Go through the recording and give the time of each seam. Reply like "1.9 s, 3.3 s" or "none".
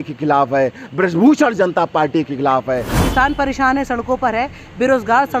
2.9 s